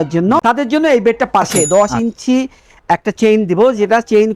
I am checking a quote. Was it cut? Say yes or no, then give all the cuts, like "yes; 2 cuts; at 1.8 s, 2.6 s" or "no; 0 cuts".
yes; 1 cut; at 1.5 s